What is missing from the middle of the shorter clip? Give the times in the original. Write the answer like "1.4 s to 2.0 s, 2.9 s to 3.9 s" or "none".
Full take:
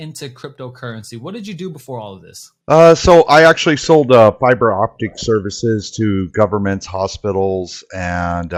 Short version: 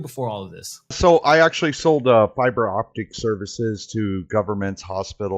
2.6 s to 3.0 s